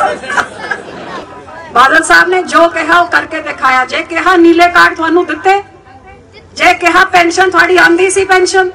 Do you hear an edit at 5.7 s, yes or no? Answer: no